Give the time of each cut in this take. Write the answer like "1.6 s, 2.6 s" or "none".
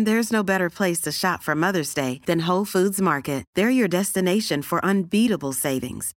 none